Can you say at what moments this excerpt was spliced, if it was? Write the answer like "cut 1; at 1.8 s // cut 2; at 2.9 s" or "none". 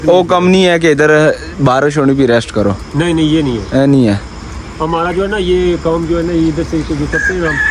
none

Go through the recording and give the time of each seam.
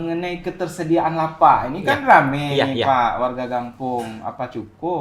none

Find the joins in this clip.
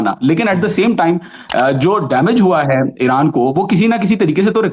none

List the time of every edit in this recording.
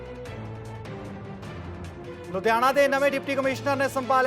cut 1; at 1.0 s

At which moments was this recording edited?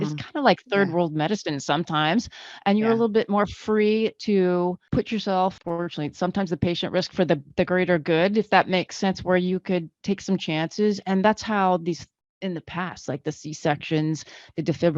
cut 1; at 4.8 s // cut 2; at 5.6 s

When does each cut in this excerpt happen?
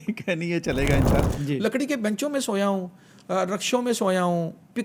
cut 1; at 1.2 s

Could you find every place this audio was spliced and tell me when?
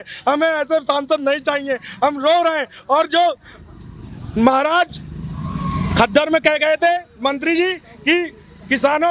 none

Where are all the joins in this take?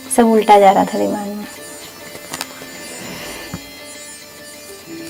none

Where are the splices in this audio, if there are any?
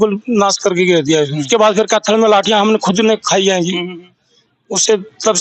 cut 1; at 1.4 s

